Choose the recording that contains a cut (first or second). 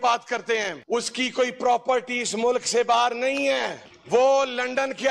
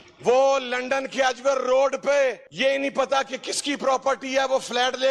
second